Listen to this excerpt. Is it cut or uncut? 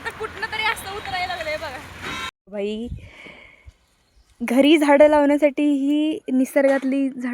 cut